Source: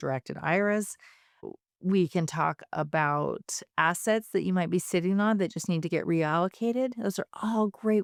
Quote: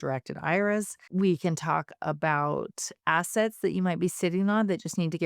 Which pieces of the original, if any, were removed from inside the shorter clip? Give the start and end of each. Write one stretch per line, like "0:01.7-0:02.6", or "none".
0:01.0-0:01.7

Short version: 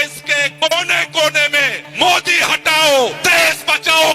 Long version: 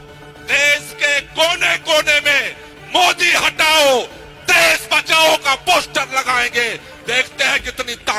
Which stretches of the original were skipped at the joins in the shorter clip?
0:02.5-0:02.7
0:04.1-0:04.4

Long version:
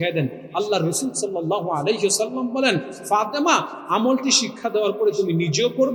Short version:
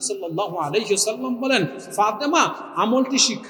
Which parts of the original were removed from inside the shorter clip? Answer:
none

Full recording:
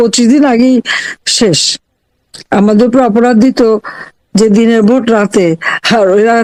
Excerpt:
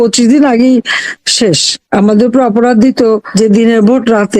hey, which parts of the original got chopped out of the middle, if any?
0:01.7-0:02.3
0:03.9-0:04.3

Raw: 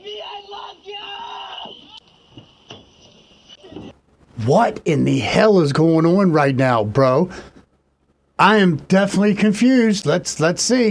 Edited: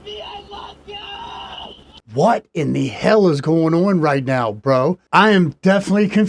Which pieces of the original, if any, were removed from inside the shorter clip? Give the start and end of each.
0:02.2-0:04.5
0:07.3-0:08.3

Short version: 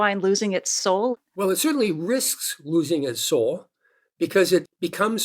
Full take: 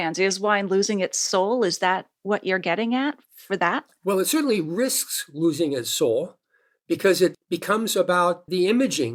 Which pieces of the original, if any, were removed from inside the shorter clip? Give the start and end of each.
0:01.6-0:03.8

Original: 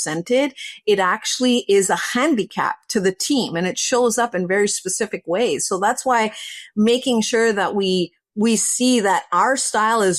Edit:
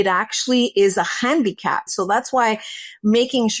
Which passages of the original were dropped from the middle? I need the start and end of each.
0:02.8-0:05.6

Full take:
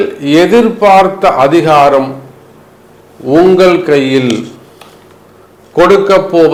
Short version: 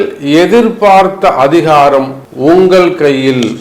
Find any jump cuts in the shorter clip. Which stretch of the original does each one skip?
0:02.2-0:03.1

